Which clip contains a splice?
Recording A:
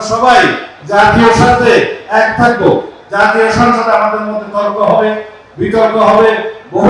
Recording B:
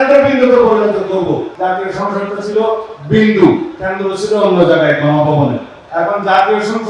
B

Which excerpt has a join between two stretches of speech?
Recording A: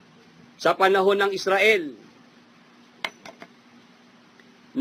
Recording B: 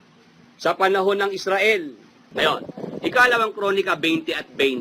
B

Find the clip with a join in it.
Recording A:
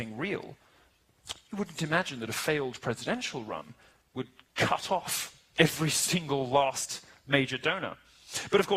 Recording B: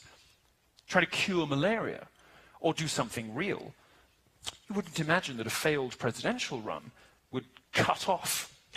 B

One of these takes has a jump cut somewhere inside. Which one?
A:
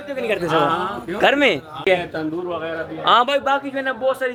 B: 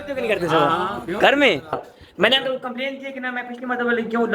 B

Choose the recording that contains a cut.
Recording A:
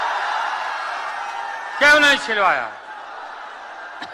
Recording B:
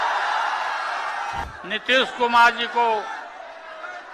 B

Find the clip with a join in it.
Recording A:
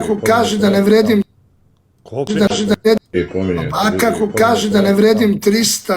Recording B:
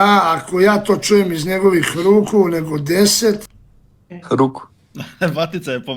A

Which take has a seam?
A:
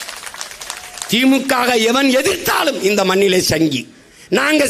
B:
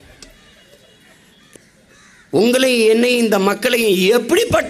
B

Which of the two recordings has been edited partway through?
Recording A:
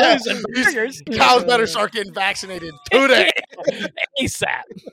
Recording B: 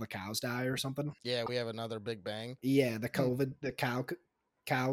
B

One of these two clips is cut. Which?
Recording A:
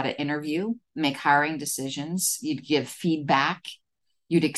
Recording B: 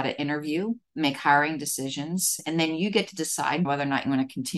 B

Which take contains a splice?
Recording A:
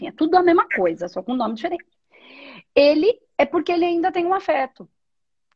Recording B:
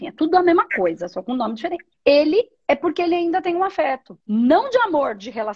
B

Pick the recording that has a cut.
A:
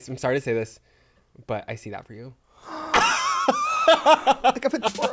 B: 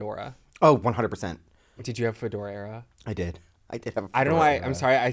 B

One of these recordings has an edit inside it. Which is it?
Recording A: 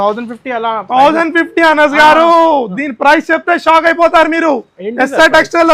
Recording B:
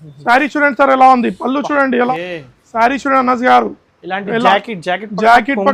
B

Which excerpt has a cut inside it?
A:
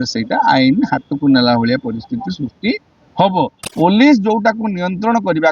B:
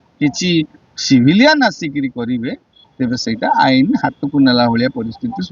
A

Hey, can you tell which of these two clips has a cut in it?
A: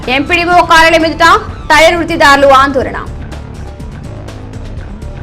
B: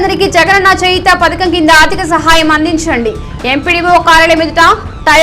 A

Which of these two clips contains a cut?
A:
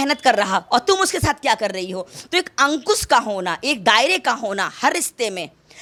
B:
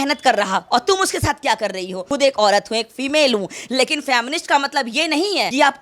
B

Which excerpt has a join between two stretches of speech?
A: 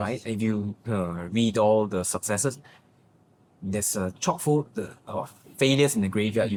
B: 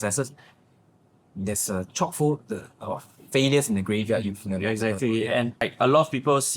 B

